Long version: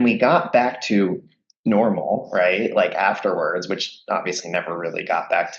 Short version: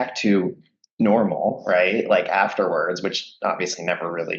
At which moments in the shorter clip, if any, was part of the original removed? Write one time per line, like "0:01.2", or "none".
none